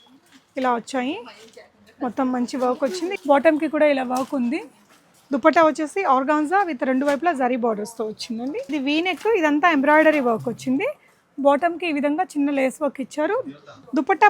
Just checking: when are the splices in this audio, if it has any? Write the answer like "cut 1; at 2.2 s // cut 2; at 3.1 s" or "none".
cut 1; at 3.1 s // cut 2; at 8.7 s